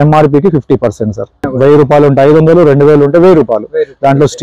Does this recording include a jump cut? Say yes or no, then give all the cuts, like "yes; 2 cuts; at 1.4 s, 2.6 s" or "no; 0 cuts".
yes; 1 cut; at 1.4 s